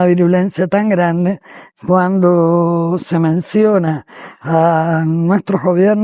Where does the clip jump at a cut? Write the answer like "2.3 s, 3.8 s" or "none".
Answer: none